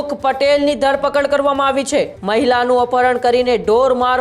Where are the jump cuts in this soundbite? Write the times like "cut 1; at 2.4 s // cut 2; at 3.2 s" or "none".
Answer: cut 1; at 2.2 s